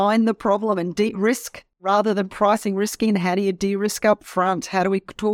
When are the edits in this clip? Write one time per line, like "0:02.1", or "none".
0:01.8